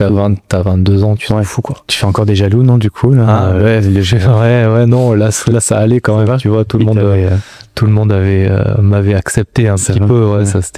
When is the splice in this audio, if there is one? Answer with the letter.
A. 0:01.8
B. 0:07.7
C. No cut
A